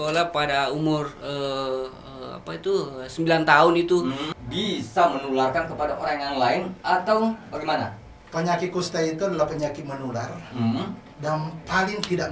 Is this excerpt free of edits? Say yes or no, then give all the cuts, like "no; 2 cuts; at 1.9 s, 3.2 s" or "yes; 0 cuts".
no; 1 cut; at 4.3 s